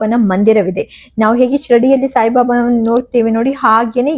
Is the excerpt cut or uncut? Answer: uncut